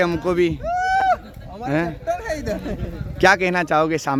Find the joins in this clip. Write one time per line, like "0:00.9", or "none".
none